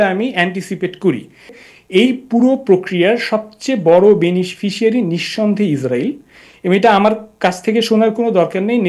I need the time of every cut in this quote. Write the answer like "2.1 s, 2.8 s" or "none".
1.6 s